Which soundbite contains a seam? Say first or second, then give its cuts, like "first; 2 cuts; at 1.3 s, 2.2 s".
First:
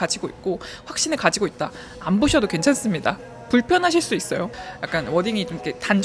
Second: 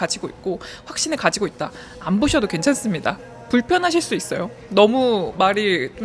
first; 1 cut; at 4.6 s